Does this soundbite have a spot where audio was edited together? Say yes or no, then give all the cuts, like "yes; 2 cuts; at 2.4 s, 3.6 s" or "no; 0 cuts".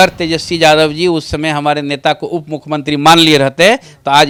no; 0 cuts